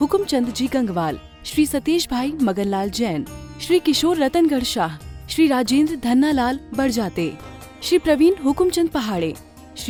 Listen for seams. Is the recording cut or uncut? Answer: uncut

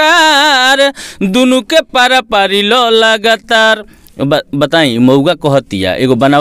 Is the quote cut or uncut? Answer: uncut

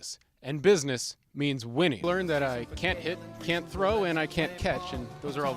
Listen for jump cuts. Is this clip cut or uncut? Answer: cut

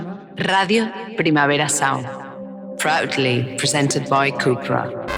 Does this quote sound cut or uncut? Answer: uncut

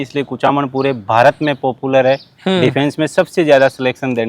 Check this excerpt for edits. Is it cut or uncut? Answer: uncut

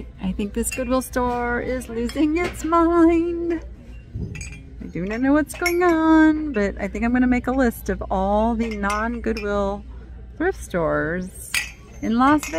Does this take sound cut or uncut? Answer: uncut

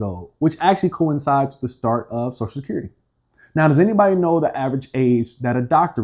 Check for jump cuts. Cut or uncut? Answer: uncut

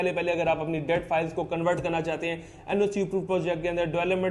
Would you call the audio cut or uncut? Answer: uncut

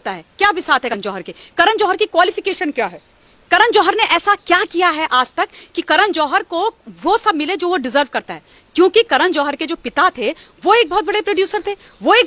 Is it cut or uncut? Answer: cut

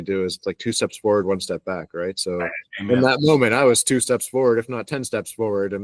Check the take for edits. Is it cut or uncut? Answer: uncut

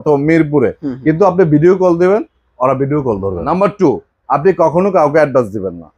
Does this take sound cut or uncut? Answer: cut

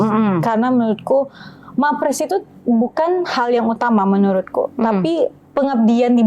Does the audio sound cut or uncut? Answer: uncut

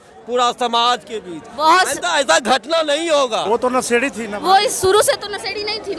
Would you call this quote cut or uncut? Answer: cut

